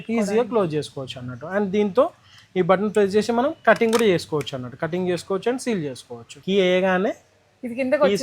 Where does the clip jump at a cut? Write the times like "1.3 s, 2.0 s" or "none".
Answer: 6.4 s